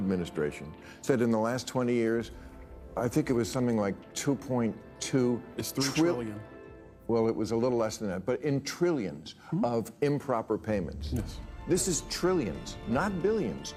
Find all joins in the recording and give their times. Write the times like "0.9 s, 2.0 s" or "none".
none